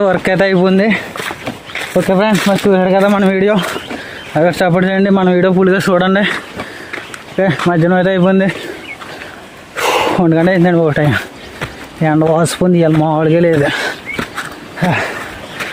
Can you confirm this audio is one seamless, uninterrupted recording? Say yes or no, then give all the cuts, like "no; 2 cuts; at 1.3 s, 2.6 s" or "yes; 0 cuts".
yes; 0 cuts